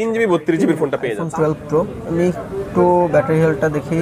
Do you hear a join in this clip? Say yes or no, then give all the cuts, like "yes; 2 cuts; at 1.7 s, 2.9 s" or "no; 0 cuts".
yes; 1 cut; at 1.1 s